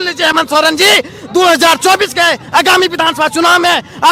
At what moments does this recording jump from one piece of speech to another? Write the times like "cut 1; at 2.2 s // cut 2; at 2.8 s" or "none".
none